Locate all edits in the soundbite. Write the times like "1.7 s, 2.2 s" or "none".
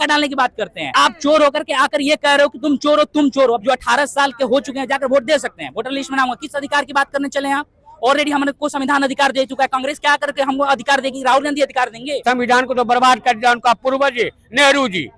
0.9 s, 3.6 s, 12.2 s